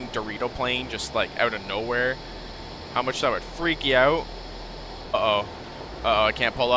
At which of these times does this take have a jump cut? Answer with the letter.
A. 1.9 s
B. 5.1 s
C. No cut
B